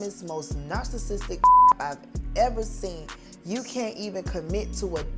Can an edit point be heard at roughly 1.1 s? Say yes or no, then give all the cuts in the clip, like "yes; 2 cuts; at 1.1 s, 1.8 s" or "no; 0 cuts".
no; 1 cut; at 3.3 s